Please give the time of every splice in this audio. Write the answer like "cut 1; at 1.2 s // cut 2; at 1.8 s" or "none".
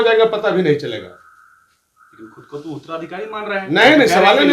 none